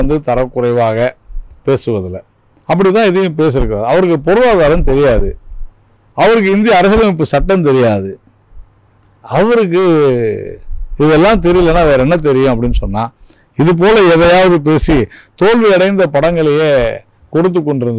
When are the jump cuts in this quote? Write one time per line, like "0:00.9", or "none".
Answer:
none